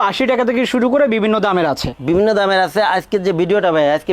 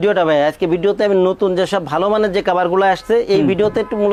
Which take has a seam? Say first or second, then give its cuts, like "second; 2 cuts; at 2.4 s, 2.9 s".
first; 1 cut; at 1.9 s